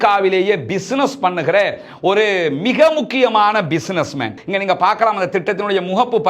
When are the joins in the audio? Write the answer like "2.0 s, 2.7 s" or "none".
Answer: 4.4 s